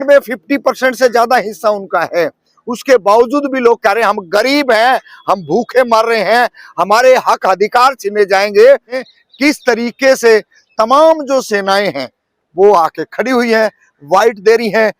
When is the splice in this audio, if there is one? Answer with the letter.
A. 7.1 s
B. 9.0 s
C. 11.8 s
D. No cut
B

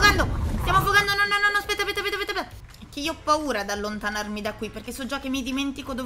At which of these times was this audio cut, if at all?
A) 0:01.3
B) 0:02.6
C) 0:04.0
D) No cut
B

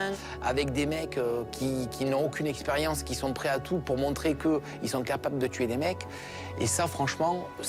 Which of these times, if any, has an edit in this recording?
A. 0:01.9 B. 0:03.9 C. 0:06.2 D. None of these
D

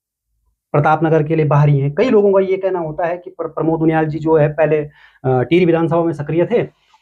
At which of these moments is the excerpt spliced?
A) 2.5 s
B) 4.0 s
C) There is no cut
C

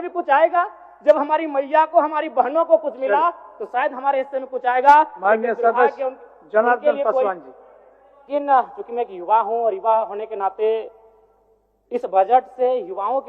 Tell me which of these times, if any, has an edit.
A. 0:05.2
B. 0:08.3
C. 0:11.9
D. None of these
B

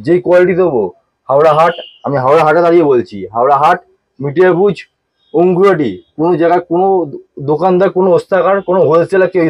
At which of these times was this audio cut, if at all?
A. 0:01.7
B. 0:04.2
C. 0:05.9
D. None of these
D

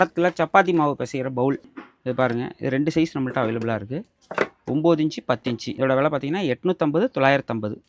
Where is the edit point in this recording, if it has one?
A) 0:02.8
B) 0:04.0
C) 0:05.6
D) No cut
D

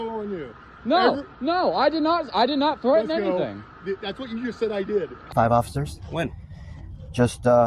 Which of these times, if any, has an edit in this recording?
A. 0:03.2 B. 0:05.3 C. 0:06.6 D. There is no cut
B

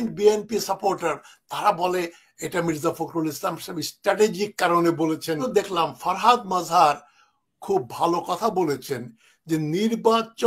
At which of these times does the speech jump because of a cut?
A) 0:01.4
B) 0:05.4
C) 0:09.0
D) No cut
B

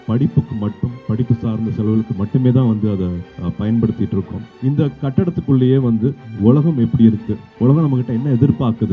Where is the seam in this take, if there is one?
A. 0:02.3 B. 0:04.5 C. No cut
B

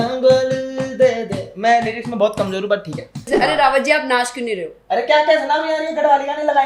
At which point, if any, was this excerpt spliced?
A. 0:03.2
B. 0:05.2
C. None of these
A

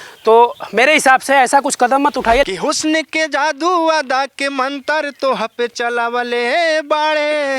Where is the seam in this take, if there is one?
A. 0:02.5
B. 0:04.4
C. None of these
A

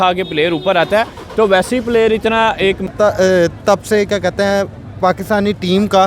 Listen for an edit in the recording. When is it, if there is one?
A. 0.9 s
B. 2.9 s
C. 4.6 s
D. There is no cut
B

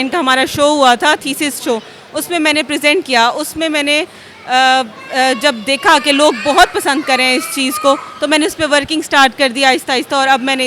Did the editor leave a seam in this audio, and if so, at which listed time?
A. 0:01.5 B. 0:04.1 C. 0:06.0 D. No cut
D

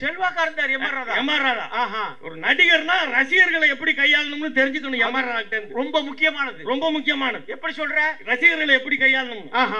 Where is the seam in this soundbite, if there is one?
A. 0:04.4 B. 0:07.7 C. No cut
C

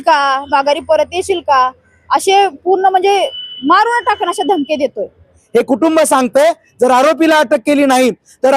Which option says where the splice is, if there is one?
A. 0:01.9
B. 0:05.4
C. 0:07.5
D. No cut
B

